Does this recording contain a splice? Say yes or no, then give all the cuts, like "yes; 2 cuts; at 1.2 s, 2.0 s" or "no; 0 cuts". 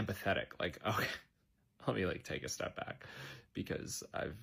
no; 0 cuts